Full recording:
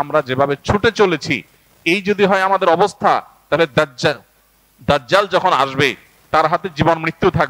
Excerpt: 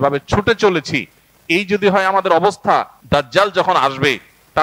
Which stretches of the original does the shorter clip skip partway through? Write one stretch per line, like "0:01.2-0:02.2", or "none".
0:03.3-0:04.7